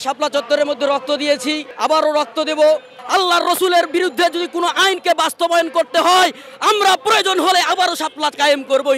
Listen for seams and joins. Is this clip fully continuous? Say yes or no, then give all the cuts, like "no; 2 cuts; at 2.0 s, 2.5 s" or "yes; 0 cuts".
no; 2 cuts; at 1.7 s, 3.0 s